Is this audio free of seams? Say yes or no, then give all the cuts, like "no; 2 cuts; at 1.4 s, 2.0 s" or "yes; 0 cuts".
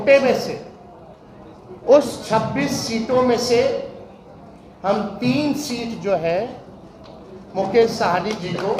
yes; 0 cuts